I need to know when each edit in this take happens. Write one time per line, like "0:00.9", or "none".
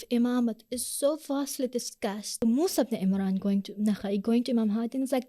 0:02.4